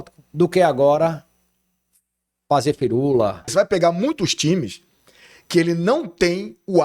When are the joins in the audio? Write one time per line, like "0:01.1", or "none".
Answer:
0:03.4